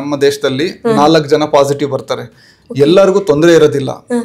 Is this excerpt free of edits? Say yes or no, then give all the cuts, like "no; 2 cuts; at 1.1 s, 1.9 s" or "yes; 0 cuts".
yes; 0 cuts